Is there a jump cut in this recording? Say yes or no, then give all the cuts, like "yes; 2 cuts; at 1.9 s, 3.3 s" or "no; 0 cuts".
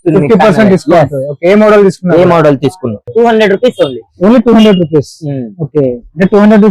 yes; 1 cut; at 3.1 s